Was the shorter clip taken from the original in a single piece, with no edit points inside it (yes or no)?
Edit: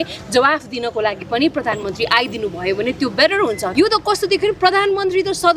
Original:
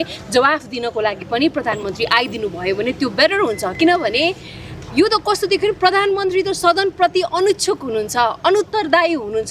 no